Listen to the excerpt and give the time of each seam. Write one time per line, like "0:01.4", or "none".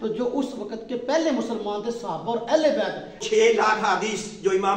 0:03.2

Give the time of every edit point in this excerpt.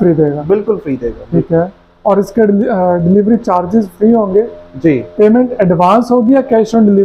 none

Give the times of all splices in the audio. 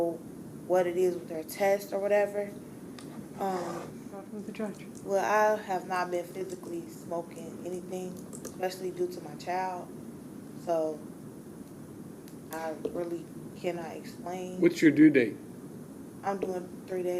0:04.4

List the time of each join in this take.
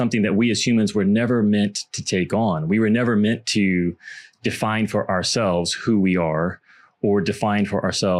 none

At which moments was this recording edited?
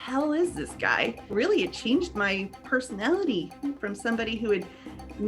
0:01.3
0:03.8

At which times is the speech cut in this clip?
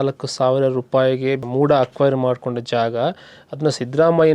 0:01.5

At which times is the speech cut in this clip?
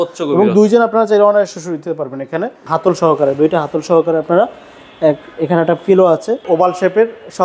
0:02.6
0:06.4

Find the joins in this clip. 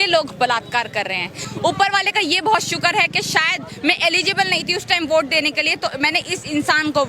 0:01.4

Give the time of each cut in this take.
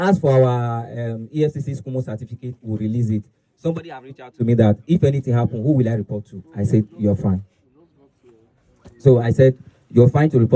none

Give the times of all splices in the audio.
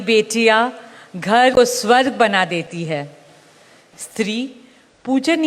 0:01.6

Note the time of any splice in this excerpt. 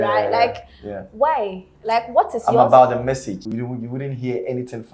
0:03.5

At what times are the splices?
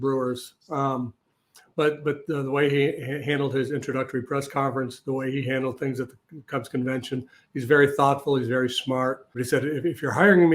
0:09.4

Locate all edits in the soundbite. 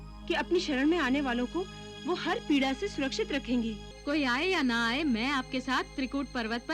0:03.9

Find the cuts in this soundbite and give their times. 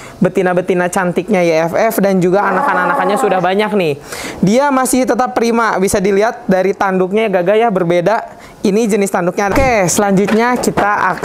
0:09.5

